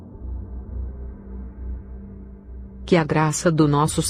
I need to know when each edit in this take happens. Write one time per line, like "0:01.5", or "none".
0:02.8